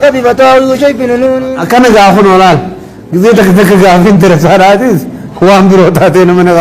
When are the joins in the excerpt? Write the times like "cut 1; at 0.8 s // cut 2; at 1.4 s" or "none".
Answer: cut 1; at 1.6 s

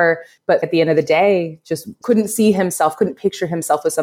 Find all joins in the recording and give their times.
none

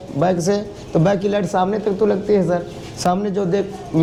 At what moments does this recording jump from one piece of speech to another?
none

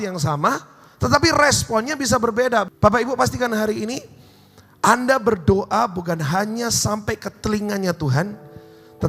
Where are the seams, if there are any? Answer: cut 1; at 2.7 s

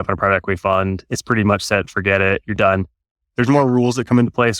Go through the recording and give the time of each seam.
none

